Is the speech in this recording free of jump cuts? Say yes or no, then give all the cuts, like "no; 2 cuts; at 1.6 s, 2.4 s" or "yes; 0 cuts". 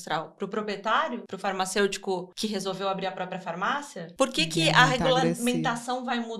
no; 3 cuts; at 1.3 s, 2.3 s, 4.0 s